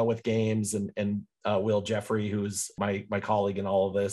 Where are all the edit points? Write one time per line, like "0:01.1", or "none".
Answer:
0:02.8